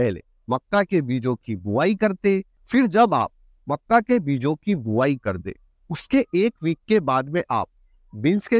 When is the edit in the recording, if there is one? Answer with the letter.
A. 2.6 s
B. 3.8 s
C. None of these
A